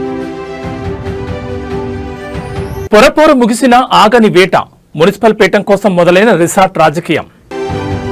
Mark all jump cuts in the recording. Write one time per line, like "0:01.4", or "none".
0:02.4